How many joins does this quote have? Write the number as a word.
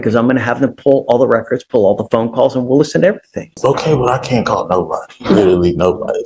one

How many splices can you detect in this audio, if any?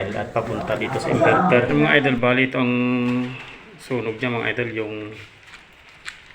one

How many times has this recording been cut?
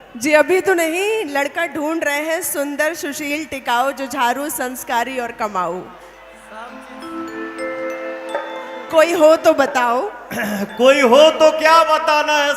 zero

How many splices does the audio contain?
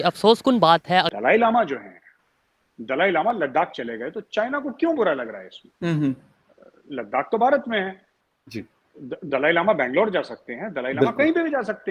one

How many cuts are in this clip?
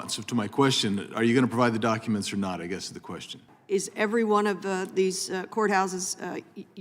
one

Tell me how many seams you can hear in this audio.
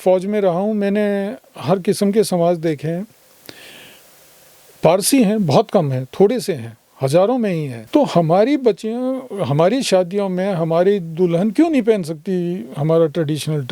one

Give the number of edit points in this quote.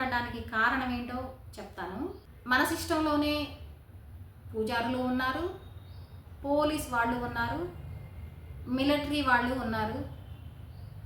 one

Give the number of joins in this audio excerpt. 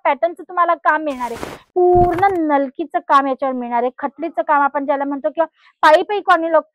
one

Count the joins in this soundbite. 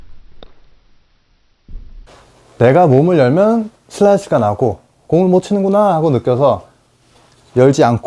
one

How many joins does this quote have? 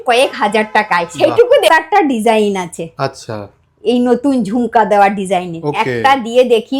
one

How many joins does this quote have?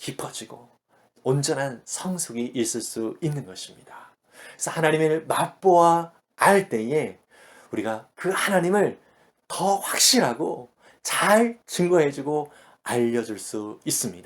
zero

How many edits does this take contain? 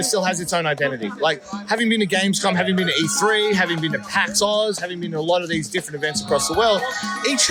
zero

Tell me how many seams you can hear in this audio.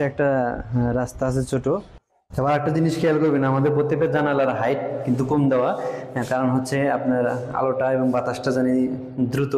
one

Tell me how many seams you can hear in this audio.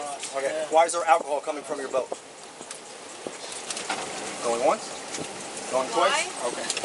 one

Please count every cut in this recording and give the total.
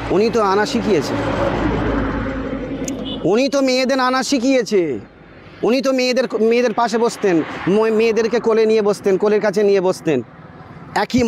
zero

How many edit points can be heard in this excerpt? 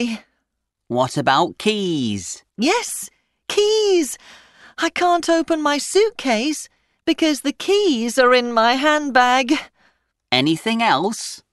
one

